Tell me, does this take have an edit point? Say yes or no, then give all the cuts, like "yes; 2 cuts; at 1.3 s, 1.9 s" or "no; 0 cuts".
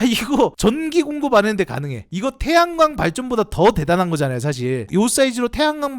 no; 0 cuts